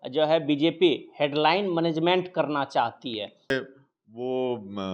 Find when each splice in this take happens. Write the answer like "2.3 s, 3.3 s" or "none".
3.5 s